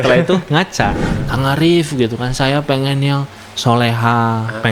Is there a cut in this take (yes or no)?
yes